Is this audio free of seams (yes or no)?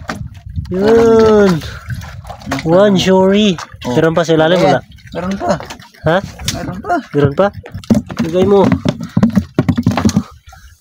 yes